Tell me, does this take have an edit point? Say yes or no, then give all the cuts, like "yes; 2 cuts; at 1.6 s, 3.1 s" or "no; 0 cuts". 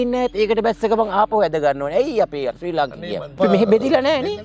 yes; 1 cut; at 3.4 s